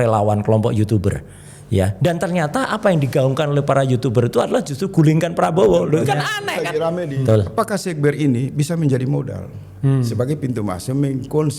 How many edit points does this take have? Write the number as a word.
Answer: one